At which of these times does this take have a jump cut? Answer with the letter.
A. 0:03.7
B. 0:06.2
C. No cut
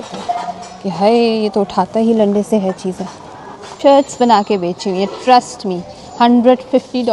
A